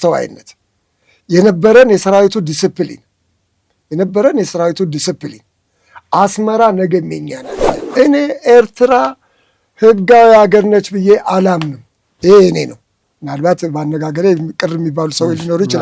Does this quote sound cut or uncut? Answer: cut